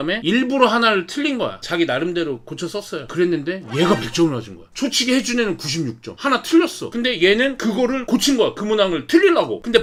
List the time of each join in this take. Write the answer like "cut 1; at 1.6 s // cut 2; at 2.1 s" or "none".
none